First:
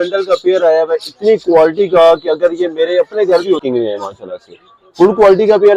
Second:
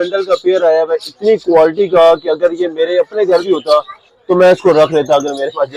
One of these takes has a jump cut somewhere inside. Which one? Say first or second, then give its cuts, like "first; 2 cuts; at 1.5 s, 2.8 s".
first; 1 cut; at 3.6 s